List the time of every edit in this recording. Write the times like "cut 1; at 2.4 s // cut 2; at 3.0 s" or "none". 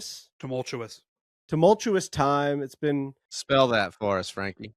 cut 1; at 3.5 s

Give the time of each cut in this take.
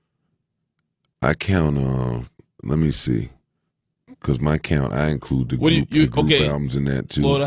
none

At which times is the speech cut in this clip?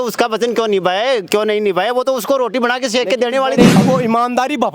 cut 1; at 3.7 s

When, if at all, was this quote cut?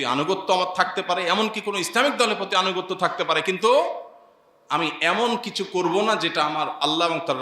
none

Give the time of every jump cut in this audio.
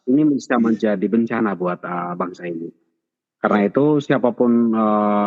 none

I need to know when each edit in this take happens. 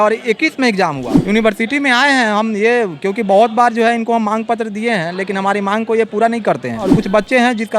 cut 1; at 1.1 s // cut 2; at 6.9 s

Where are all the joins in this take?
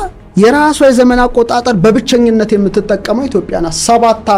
none

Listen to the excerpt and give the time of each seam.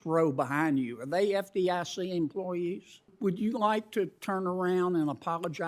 cut 1; at 3.1 s

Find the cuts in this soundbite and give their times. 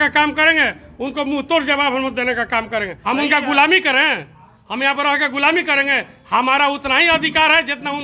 cut 1; at 3.0 s

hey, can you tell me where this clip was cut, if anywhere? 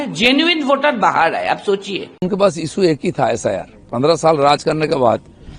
cut 1; at 2.2 s

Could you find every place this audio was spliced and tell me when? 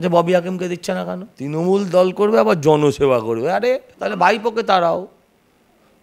cut 1; at 1.3 s // cut 2; at 3.9 s

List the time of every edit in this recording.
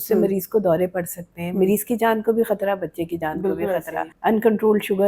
cut 1; at 4.0 s

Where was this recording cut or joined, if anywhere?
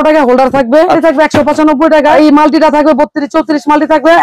cut 1; at 1.0 s // cut 2; at 2.1 s

